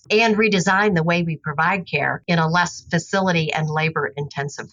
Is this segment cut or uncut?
uncut